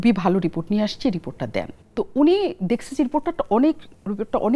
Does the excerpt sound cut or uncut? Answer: cut